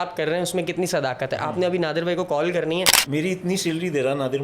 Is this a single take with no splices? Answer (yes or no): no